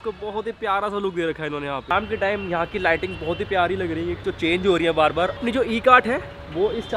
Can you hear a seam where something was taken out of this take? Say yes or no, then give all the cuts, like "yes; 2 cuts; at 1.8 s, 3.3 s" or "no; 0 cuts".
yes; 2 cuts; at 1.9 s, 5.4 s